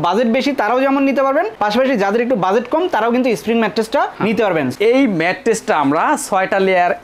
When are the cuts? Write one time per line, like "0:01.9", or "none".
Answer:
0:04.7